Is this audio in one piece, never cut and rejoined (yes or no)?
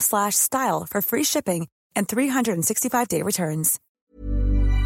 no